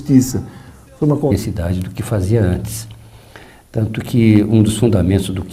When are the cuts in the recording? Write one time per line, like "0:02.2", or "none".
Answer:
none